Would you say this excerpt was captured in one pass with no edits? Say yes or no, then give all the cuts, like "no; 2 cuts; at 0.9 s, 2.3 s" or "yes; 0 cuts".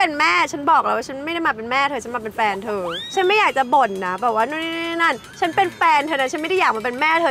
yes; 0 cuts